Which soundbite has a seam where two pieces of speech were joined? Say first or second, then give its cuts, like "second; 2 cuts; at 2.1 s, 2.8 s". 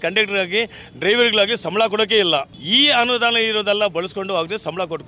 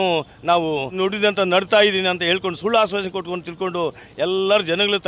second; 1 cut; at 0.9 s